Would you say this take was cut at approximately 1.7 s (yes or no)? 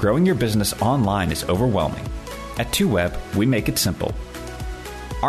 no